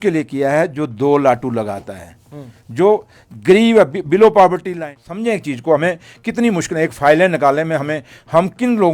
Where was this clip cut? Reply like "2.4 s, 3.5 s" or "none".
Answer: 5.1 s